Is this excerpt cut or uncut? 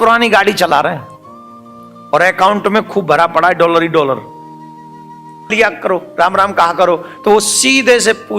cut